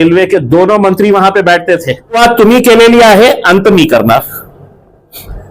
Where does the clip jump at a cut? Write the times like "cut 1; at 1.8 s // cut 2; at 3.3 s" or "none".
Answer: cut 1; at 2.2 s